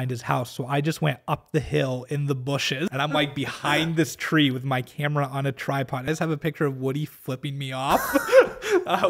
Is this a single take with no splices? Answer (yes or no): no